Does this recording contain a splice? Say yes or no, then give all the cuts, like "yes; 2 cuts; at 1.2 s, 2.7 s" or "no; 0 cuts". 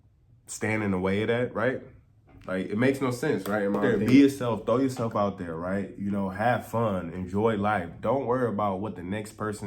yes; 1 cut; at 3.8 s